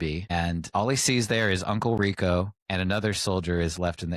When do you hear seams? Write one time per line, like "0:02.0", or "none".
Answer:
0:02.6